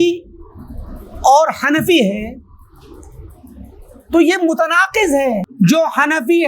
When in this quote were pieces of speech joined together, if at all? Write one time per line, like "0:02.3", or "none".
0:05.5